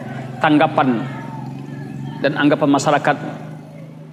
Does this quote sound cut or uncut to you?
uncut